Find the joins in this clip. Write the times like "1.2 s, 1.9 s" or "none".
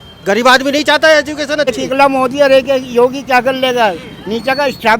1.7 s